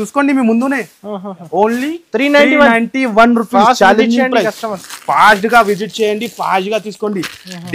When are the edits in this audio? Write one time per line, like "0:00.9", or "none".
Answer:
none